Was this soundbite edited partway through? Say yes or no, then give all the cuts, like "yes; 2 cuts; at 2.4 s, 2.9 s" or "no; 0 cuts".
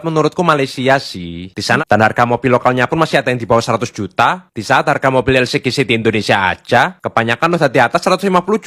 yes; 1 cut; at 1.8 s